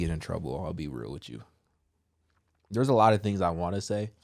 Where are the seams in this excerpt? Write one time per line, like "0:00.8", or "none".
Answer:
none